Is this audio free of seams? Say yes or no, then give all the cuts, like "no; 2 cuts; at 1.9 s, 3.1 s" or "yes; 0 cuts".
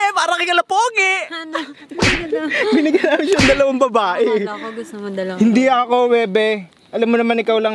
yes; 0 cuts